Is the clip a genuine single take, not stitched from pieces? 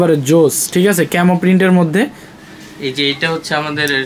no; 1 cut; at 2.4 s

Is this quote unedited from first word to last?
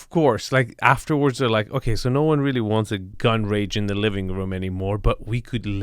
no; 1 cut; at 3.1 s

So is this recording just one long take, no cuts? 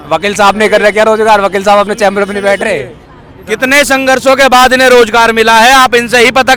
yes; 0 cuts

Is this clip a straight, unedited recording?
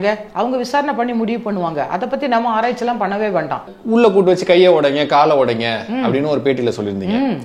no; 1 cut; at 3.7 s

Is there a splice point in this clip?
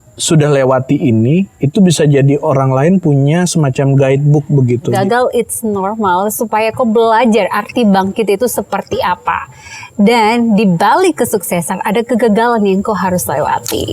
yes; 1 cut; at 4.9 s

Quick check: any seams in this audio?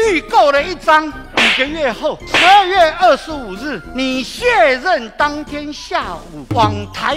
no; 0 cuts

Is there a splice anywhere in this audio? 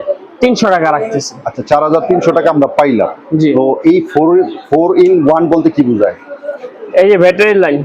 no; 0 cuts

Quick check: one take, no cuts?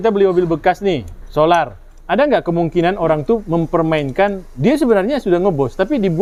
yes; 0 cuts

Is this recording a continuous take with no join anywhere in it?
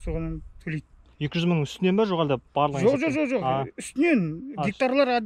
yes; 0 cuts

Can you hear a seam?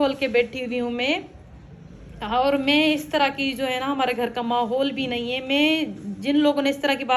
no; 0 cuts

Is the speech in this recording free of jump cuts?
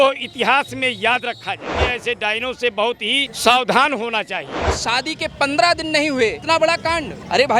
no; 3 cuts; at 1.8 s, 4.7 s, 6.4 s

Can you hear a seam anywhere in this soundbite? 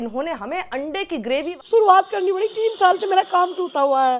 yes; 1 cut; at 1.5 s

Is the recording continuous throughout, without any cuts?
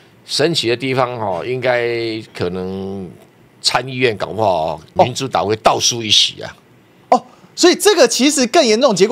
no; 1 cut; at 4.8 s

